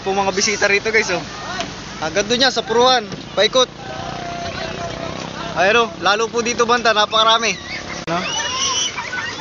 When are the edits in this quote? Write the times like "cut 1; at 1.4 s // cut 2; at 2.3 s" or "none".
cut 1; at 8.1 s